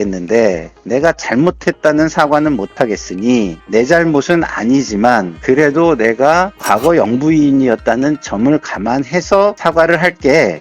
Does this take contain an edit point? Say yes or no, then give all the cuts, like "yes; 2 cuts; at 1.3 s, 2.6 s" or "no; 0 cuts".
yes; 1 cut; at 3.6 s